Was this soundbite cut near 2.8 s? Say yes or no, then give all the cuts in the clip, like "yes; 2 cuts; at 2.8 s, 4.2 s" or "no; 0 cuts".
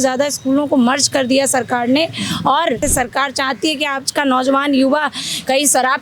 yes; 1 cut; at 2.8 s